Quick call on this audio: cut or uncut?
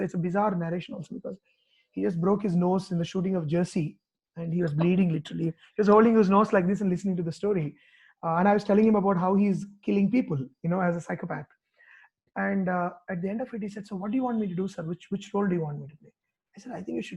uncut